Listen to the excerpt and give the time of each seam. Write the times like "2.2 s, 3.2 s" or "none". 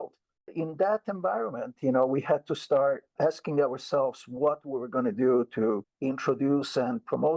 3.1 s